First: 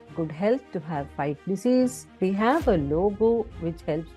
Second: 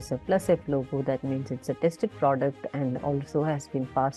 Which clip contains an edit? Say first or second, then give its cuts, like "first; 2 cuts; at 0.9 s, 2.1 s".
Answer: first; 1 cut; at 2.0 s